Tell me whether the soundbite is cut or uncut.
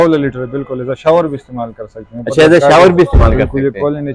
uncut